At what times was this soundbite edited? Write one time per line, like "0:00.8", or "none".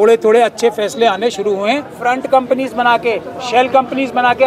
0:01.9